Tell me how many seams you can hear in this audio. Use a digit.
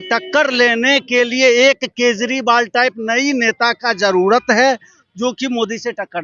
0